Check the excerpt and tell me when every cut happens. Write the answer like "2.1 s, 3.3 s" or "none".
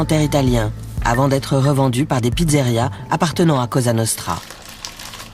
none